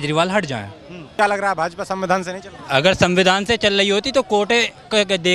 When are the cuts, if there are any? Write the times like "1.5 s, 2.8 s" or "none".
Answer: 1.1 s